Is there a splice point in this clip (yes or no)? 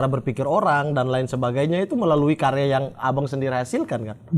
no